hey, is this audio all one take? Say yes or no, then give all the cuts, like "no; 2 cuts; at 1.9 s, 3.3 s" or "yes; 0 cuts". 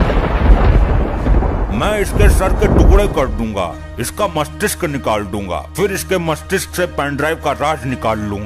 yes; 0 cuts